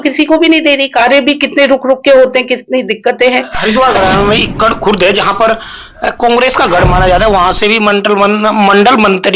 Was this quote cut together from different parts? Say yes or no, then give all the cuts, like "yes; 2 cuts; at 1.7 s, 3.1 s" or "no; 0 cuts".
yes; 1 cut; at 3.5 s